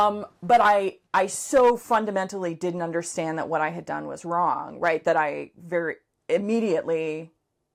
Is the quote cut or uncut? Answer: uncut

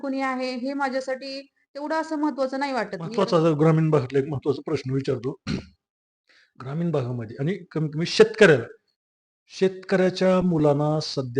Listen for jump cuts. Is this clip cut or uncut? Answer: cut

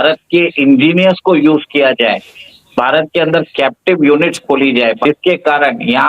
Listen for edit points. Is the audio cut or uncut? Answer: cut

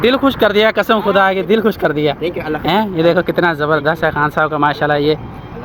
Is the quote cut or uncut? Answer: uncut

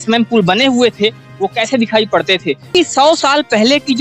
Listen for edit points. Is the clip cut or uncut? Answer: cut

